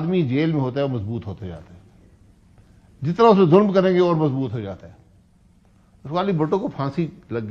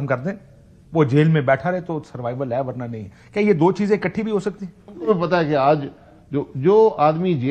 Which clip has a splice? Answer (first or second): second